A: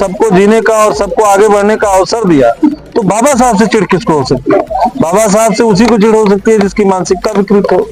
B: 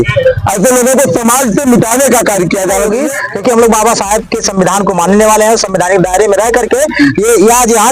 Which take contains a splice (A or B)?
B